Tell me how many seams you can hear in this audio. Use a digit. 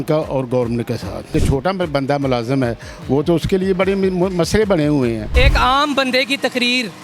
2